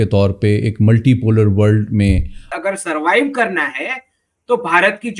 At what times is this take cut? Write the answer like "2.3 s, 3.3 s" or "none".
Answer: 2.5 s